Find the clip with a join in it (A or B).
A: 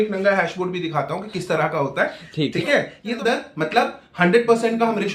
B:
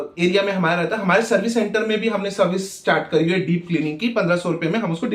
A